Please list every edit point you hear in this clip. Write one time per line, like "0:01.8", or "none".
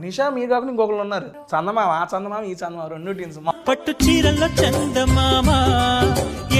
0:01.3
0:03.5